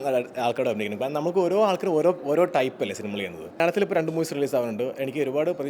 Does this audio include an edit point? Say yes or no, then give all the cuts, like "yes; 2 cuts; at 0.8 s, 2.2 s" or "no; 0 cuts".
yes; 1 cut; at 3.6 s